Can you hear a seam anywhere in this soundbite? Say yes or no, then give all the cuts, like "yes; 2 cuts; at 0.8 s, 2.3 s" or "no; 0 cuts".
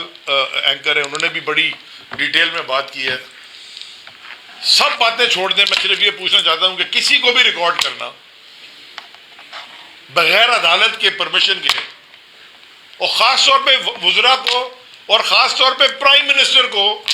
no; 0 cuts